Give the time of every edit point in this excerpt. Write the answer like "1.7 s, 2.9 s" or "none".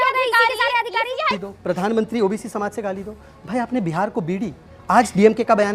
1.4 s